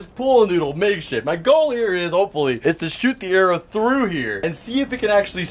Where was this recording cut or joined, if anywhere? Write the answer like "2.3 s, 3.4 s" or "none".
none